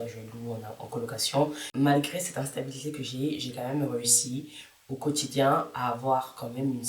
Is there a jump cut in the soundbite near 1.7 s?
yes; 1 cut; at 1.7 s

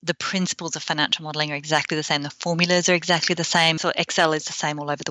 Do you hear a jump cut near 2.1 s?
no; 1 cut; at 3.8 s

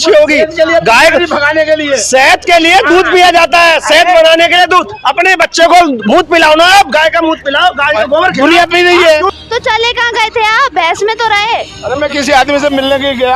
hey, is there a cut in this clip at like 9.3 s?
yes; 1 cut; at 9.3 s

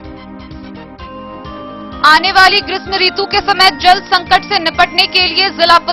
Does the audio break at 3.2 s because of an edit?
no; 1 cut; at 1.8 s

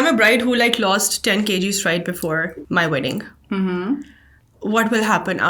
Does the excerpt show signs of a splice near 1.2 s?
no; 1 cut; at 2.6 s

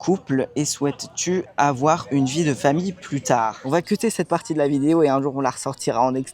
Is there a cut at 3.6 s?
yes; 1 cut; at 3.6 s

